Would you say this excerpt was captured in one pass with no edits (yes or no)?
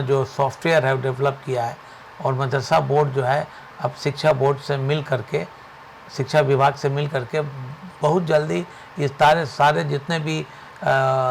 yes